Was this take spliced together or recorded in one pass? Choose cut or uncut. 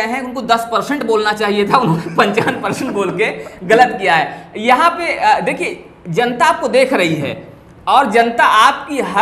uncut